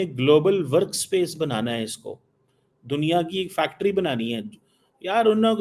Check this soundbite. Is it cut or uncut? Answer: uncut